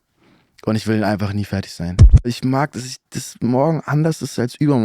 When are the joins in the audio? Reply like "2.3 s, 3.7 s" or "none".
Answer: 2.3 s